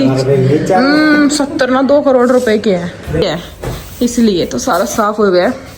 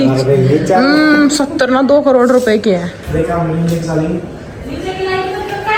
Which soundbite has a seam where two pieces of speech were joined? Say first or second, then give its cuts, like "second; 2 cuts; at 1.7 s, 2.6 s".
first; 1 cut; at 3.2 s